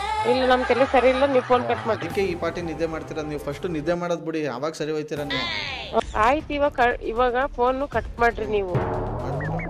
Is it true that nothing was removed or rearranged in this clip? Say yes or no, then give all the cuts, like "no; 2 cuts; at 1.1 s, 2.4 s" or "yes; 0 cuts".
no; 1 cut; at 6.0 s